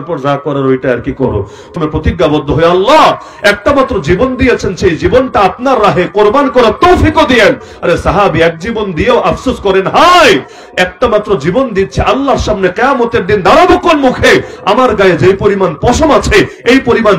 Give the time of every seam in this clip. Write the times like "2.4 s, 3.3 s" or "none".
1.8 s